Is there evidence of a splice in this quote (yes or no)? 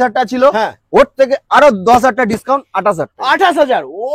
no